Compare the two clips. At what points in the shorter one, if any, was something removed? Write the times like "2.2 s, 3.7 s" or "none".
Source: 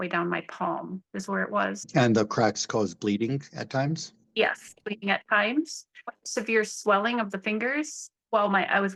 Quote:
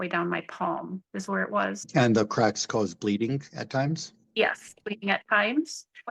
none